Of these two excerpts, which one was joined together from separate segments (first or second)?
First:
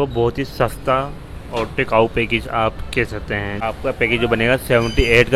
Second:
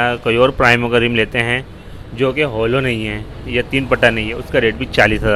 first